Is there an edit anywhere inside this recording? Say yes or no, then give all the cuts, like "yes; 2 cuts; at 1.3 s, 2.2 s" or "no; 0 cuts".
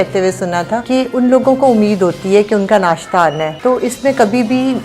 yes; 2 cuts; at 0.8 s, 3.5 s